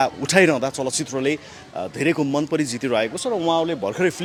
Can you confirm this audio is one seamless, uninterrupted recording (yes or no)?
yes